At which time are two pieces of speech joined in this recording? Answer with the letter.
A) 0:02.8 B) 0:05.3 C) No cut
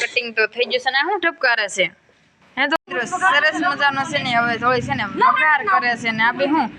A